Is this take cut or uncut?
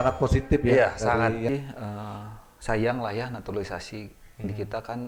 cut